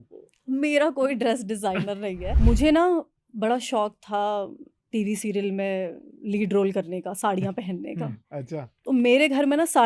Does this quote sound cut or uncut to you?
cut